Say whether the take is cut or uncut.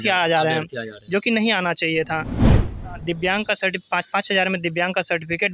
cut